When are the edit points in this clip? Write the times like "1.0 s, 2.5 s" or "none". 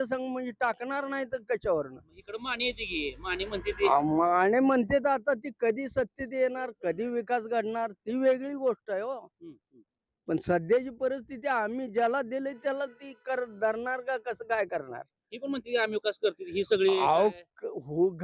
none

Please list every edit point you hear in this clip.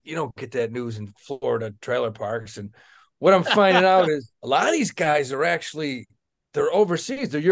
4.3 s

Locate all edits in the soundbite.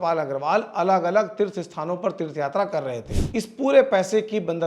3.1 s

